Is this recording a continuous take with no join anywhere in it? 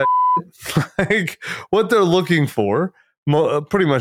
yes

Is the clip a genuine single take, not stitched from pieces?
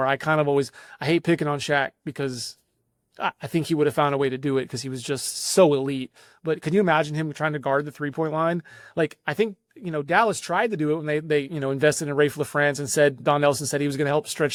yes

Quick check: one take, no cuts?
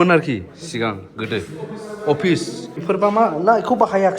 no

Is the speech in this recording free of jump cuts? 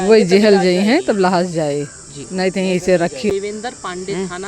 no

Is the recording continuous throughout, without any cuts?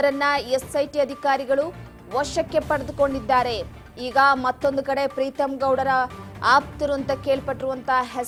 yes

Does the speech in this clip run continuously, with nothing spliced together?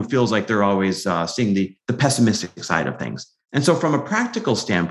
yes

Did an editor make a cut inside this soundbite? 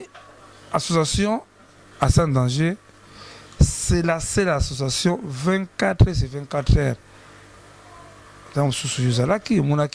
no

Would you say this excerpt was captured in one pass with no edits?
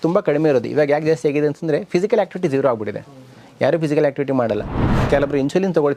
no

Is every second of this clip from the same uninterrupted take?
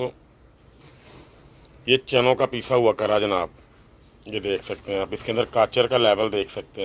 yes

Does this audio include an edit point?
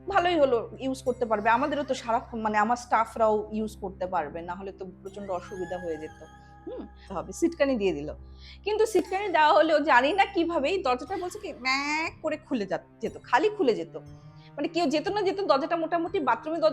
yes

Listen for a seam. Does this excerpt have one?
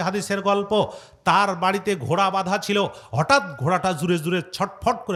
no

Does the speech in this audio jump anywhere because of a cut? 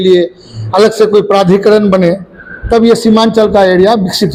no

